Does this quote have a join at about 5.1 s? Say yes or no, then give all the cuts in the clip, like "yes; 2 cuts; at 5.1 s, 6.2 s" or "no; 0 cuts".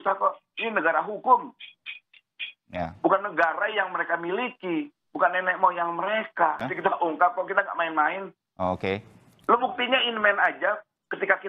no; 1 cut; at 6.7 s